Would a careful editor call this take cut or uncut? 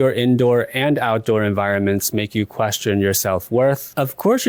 uncut